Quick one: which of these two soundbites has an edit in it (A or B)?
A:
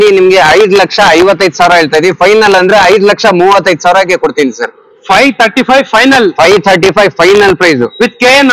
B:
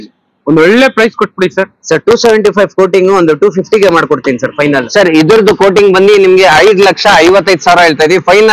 B